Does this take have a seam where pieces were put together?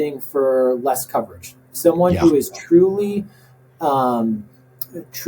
no; 0 cuts

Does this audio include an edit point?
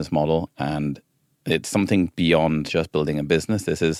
no; 0 cuts

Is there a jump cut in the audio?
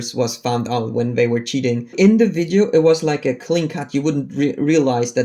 yes; 1 cut; at 1.9 s

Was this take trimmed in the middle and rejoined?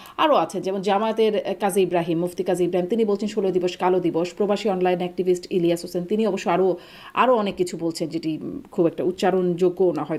no; 0 cuts

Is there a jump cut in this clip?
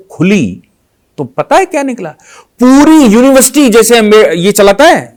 no; 0 cuts

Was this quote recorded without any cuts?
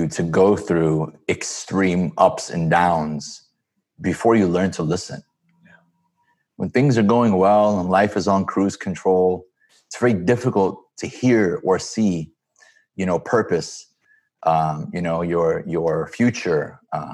yes; 0 cuts

